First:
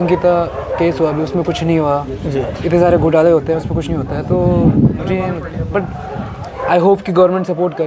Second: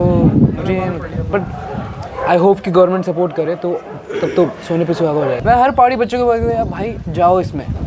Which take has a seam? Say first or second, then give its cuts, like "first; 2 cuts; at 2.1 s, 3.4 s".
second; 1 cut; at 5.4 s